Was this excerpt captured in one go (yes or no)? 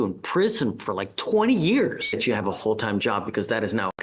no